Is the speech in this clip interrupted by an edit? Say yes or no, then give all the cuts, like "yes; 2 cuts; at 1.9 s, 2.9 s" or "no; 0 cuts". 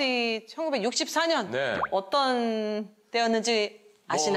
no; 0 cuts